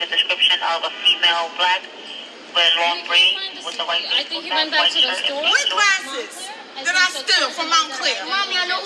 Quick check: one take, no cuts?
yes; 0 cuts

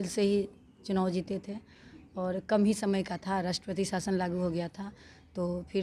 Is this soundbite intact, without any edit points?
yes; 0 cuts

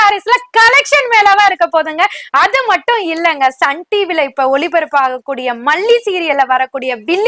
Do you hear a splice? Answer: no; 0 cuts

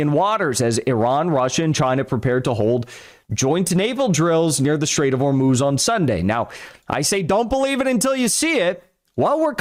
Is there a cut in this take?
no; 0 cuts

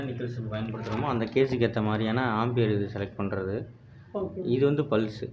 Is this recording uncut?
yes; 0 cuts

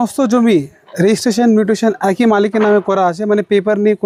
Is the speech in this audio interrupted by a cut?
no; 0 cuts

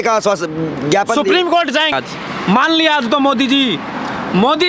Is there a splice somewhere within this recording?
yes; 1 cut; at 1.9 s

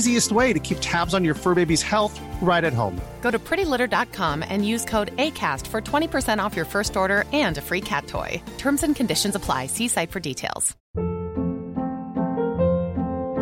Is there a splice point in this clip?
yes; 1 cut; at 10.7 s

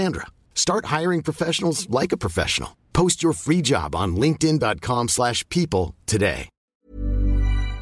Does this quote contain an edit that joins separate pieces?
yes; 1 cut; at 6.5 s

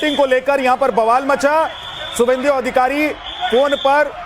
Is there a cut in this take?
no; 0 cuts

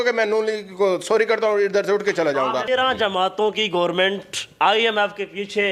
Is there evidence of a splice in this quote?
yes; 1 cut; at 2.6 s

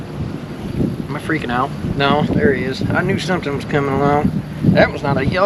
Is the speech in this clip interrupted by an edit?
no; 0 cuts

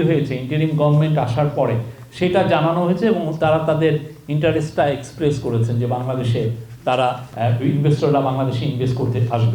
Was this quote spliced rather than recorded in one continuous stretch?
yes; 1 cut; at 7.3 s

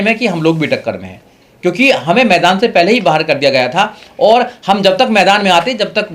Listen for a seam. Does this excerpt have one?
no; 0 cuts

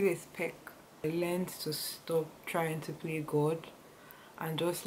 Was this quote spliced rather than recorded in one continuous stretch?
yes; 1 cut; at 1.0 s

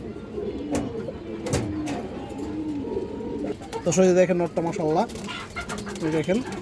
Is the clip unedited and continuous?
yes; 0 cuts

